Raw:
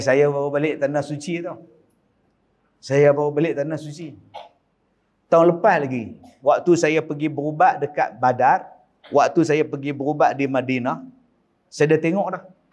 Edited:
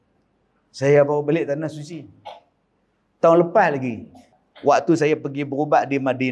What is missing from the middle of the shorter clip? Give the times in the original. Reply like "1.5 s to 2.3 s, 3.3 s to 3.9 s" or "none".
6.3 s to 8.7 s